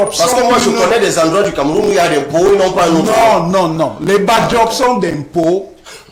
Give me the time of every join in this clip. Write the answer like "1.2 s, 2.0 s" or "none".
none